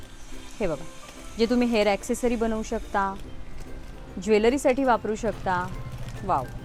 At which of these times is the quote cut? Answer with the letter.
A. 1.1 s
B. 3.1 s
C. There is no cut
C